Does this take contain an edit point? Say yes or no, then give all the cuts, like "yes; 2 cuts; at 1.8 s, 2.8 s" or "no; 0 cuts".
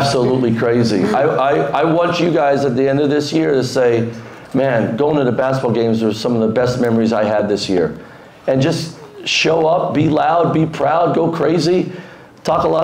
no; 0 cuts